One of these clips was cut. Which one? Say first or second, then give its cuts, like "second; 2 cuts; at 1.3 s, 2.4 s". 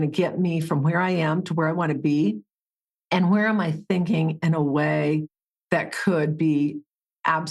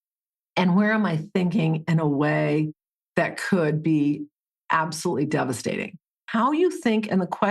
second; 1 cut; at 6.2 s